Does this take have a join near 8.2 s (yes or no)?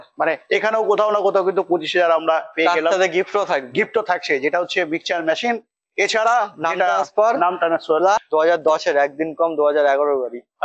yes